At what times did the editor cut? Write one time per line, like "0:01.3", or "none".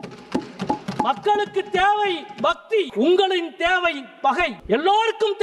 0:02.9
0:04.6